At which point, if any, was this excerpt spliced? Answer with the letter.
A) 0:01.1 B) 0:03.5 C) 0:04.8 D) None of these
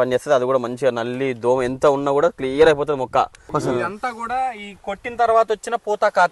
B